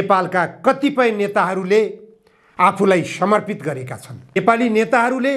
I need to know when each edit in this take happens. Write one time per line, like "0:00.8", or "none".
0:04.4